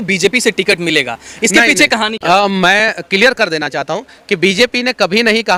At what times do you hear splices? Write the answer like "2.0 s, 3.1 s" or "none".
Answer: none